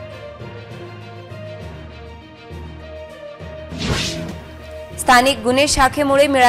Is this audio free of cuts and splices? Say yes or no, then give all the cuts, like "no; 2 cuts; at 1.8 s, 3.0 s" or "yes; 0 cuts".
no; 1 cut; at 1.2 s